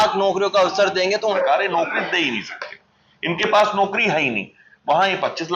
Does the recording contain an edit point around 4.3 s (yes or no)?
no